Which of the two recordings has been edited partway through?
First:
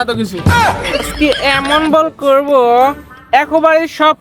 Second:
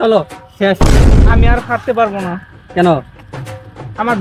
first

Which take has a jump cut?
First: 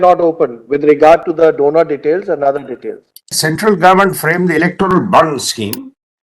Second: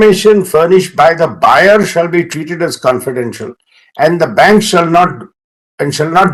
first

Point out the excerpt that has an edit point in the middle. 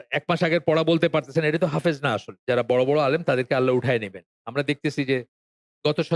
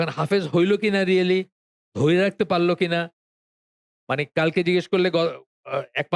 first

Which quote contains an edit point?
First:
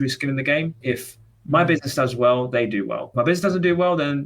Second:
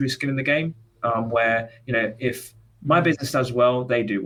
first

